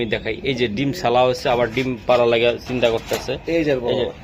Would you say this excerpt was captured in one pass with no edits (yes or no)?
yes